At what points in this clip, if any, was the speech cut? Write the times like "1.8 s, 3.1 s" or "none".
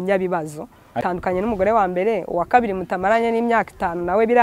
1.0 s